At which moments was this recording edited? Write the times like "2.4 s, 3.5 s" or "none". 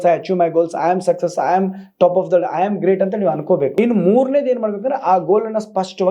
3.7 s